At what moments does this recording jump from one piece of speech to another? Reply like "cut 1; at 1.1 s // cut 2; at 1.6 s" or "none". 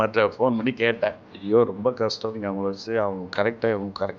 cut 1; at 1.3 s